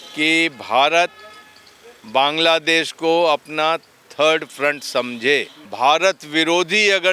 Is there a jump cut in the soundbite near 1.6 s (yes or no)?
no